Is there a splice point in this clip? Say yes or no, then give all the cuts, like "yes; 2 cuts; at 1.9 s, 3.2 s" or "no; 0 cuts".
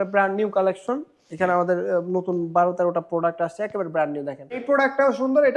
yes; 1 cut; at 4.6 s